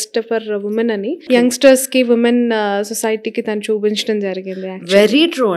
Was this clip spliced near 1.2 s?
yes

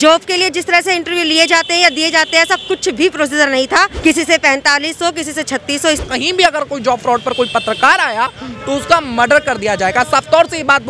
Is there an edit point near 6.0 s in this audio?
yes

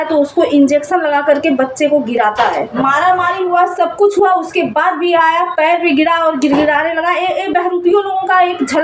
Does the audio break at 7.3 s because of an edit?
no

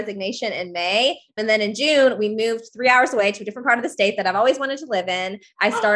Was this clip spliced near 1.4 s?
yes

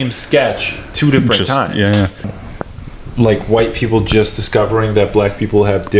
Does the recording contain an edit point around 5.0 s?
no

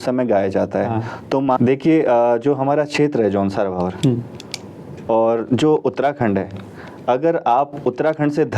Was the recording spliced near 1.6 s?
yes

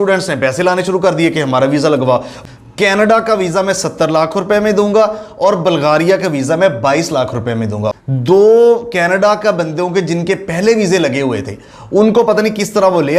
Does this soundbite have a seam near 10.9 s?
no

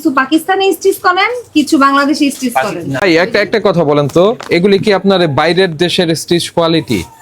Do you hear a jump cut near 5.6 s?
no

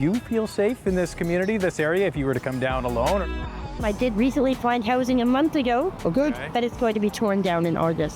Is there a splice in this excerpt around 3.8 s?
yes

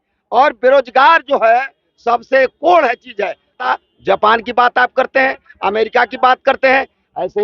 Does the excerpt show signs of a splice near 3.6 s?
yes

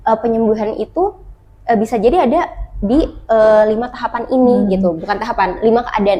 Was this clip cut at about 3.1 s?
no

